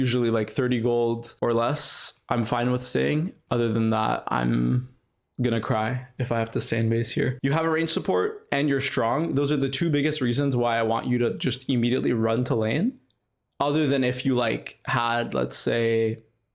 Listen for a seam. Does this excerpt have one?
yes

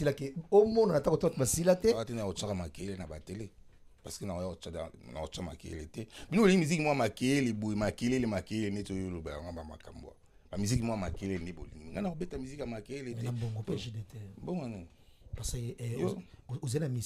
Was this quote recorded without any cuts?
no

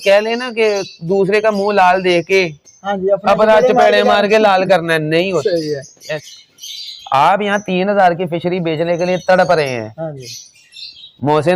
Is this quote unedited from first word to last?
no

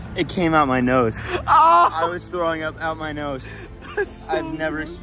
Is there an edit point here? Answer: no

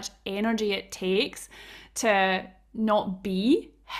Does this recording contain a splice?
no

